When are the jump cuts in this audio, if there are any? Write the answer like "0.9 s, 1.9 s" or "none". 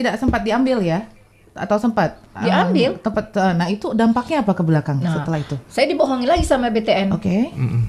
none